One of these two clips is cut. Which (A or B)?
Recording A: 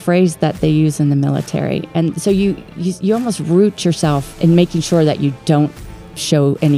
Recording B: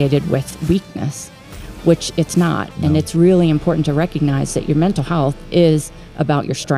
A